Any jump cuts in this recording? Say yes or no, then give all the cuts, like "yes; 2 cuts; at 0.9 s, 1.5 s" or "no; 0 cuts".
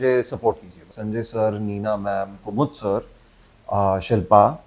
yes; 1 cut; at 0.9 s